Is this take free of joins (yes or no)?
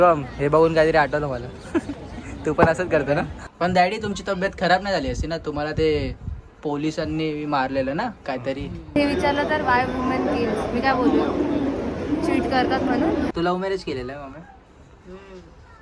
no